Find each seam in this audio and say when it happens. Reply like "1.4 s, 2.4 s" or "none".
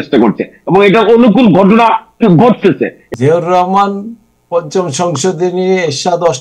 2.9 s